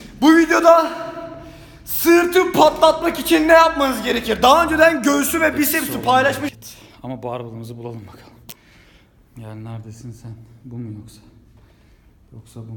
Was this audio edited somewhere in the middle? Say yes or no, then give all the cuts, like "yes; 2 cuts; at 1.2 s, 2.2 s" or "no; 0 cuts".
yes; 1 cut; at 6.5 s